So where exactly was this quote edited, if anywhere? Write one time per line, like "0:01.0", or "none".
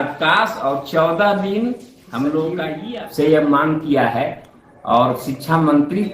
0:02.8